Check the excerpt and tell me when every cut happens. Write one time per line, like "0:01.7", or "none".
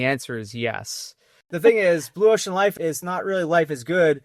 0:01.5
0:02.8